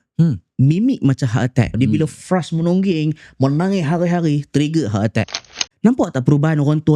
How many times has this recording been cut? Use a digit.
2